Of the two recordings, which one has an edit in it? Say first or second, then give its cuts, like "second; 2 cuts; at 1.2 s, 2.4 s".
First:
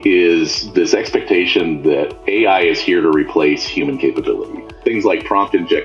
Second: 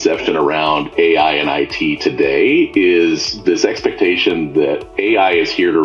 first; 1 cut; at 4.8 s